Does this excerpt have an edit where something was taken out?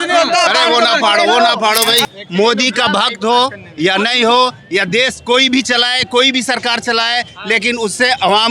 yes; 1 cut; at 2.1 s

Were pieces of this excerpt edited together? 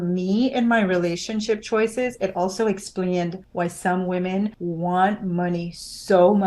yes; 2 cuts; at 3.4 s, 4.6 s

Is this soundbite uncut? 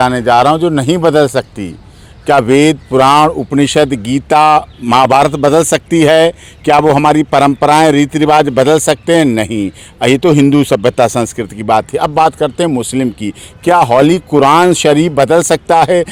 yes; 0 cuts

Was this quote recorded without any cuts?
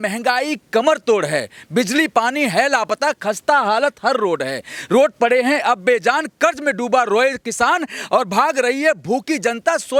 yes; 0 cuts

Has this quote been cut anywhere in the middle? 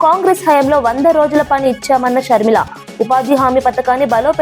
no; 0 cuts

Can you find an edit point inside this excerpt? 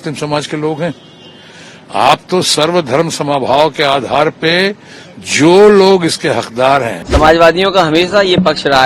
yes; 1 cut; at 7.0 s

